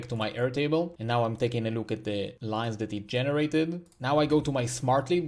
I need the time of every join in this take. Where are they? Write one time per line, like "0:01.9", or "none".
0:01.0
0:02.4
0:03.9